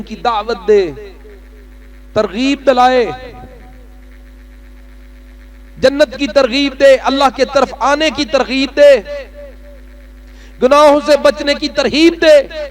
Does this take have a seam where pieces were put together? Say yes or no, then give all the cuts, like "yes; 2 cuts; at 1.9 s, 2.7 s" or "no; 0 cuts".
no; 0 cuts